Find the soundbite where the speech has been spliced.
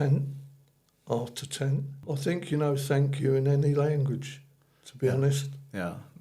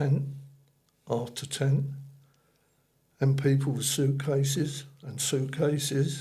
first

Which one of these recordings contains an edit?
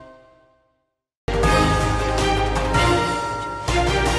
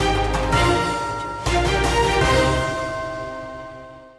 first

